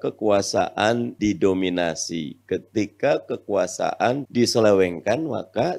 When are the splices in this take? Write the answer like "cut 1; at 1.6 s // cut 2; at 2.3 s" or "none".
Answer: cut 1; at 1.1 s // cut 2; at 4.2 s